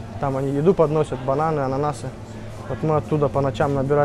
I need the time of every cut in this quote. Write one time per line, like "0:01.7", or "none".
none